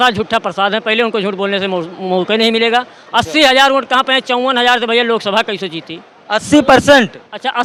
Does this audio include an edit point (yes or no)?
no